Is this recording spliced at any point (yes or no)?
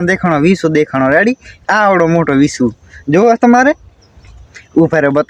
no